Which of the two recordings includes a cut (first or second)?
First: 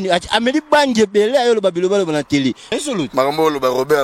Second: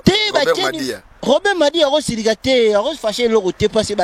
first